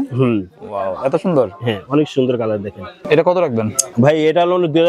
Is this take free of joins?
no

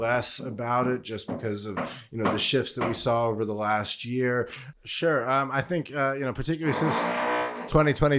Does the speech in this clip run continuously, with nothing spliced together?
no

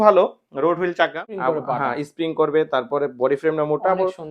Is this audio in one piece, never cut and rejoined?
no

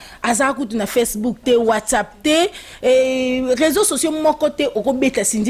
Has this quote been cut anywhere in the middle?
no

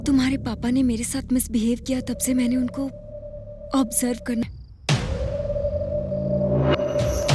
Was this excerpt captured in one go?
no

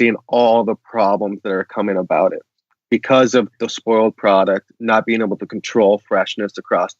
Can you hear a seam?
yes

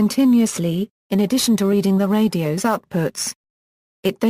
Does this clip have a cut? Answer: yes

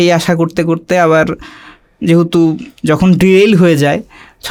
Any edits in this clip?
no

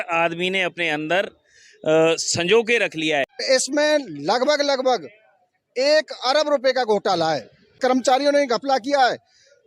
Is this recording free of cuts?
no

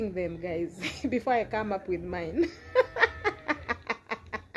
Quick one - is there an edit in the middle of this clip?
no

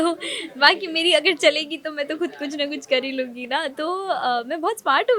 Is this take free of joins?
yes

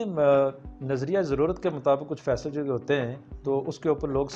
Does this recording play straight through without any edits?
yes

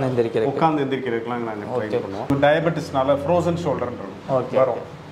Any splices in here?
yes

